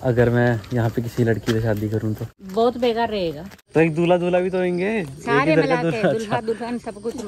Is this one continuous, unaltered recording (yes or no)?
no